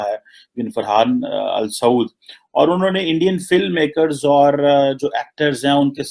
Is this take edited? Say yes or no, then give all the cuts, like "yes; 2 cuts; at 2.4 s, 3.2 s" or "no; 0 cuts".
no; 0 cuts